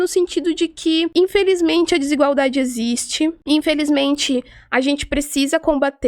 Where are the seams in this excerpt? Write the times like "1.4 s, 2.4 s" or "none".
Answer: 1.1 s, 3.4 s